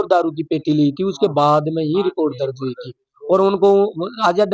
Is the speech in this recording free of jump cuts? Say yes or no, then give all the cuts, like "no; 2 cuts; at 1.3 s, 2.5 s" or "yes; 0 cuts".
yes; 0 cuts